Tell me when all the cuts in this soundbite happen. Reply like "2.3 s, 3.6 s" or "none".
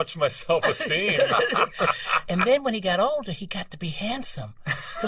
2.1 s